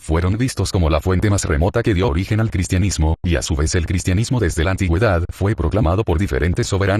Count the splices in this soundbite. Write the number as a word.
one